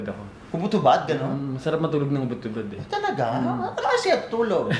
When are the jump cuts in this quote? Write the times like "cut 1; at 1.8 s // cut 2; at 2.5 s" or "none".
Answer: none